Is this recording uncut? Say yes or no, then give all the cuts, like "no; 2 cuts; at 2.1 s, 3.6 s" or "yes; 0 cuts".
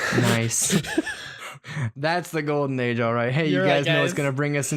yes; 0 cuts